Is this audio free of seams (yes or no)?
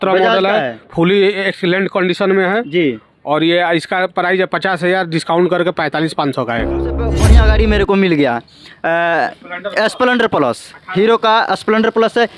no